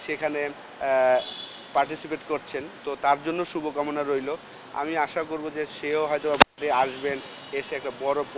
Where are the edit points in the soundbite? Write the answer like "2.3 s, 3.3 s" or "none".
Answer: none